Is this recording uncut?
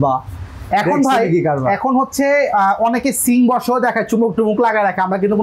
yes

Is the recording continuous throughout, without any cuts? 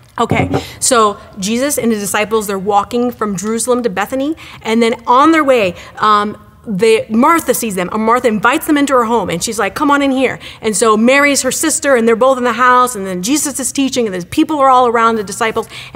no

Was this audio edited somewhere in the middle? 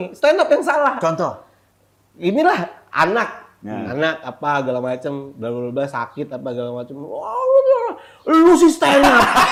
no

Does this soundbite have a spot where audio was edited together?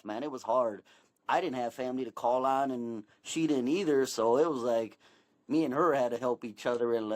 yes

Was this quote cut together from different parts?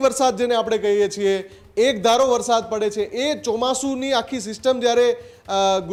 no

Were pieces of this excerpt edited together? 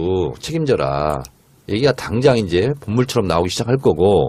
no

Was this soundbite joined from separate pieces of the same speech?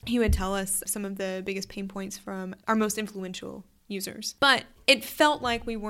yes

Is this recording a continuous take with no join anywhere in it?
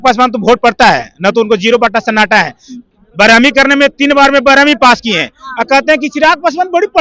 yes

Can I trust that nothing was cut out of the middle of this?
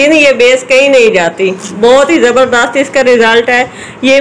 yes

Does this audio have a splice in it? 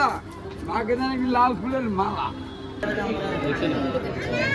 yes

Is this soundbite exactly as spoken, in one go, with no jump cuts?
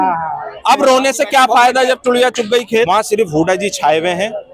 no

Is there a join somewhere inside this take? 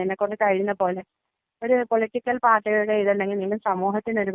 no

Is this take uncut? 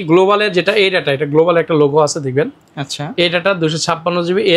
yes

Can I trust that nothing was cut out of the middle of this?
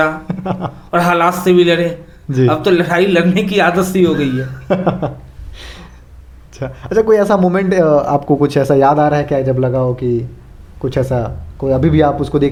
yes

